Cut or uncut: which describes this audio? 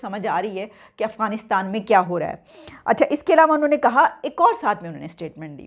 uncut